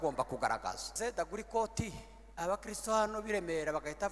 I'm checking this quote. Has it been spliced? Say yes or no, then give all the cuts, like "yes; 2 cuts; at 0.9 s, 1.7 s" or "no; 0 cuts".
yes; 1 cut; at 0.9 s